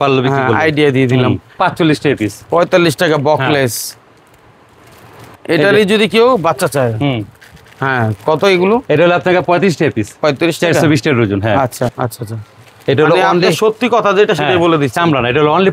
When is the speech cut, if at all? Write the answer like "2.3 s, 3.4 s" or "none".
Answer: 1.5 s, 11.9 s